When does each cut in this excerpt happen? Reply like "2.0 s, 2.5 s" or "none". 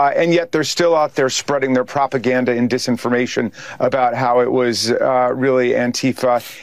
none